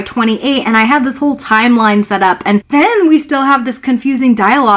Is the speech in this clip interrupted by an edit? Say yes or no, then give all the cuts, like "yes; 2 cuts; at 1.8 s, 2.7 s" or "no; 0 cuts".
yes; 1 cut; at 2.7 s